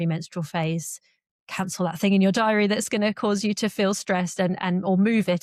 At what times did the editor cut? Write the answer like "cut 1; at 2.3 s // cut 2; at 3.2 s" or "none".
none